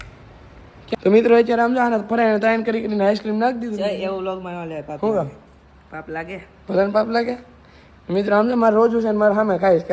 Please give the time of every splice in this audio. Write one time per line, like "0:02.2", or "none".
0:01.0